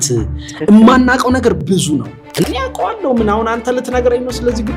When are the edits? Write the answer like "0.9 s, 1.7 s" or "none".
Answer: 2.4 s

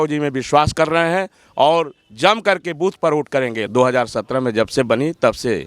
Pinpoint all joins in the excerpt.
3.6 s

